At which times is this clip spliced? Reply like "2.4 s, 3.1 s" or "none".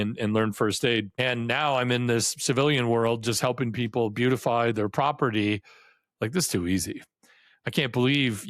1.1 s